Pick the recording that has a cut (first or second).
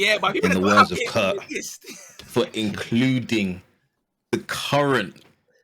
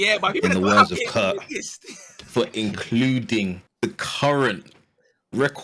second